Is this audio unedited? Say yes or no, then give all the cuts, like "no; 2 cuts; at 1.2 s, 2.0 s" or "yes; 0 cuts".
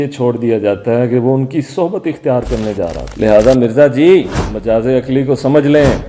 no; 1 cut; at 3.0 s